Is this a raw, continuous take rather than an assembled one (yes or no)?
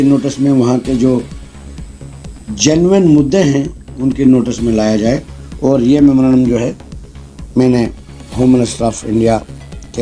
yes